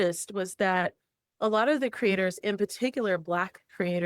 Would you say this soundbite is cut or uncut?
cut